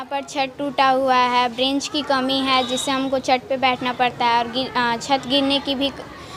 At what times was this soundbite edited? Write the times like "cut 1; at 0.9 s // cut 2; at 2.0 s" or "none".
none

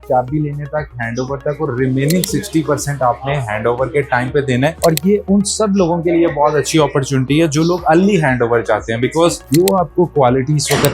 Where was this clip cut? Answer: cut 1; at 9.4 s

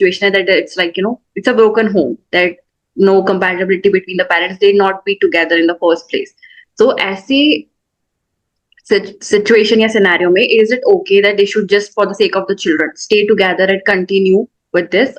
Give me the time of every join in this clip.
none

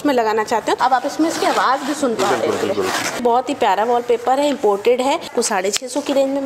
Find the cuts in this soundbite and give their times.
cut 1; at 0.8 s // cut 2; at 3.2 s // cut 3; at 5.3 s

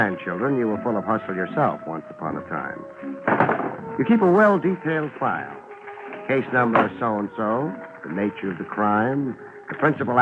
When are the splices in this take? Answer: none

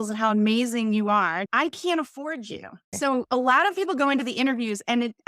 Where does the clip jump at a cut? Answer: cut 1; at 1.5 s // cut 2; at 2.9 s

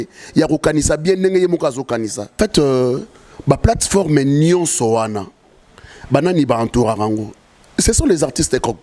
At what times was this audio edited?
cut 1; at 2.4 s

